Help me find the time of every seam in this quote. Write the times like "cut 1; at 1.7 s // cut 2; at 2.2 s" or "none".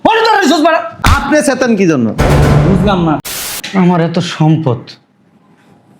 cut 1; at 3.3 s